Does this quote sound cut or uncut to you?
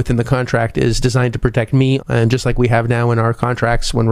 cut